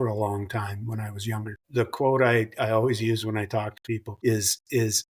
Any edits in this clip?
yes; 2 cuts; at 1.6 s, 4.1 s

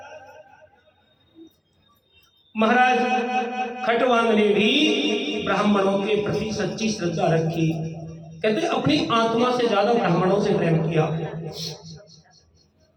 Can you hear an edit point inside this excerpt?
no; 0 cuts

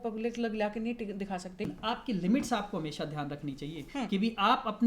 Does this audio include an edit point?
yes; 1 cut; at 1.7 s

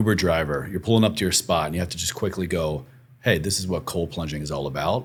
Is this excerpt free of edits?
yes; 0 cuts

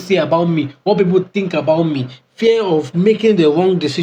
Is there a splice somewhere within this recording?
no; 0 cuts

